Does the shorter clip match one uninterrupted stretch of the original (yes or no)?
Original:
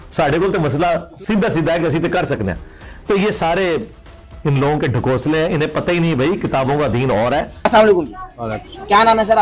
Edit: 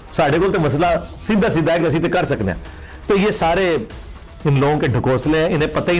yes